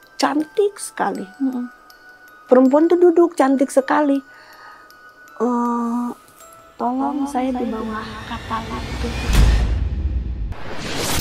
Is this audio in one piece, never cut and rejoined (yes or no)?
no